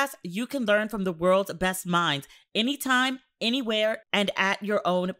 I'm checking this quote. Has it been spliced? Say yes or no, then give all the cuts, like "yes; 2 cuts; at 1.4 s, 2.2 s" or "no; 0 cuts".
no; 0 cuts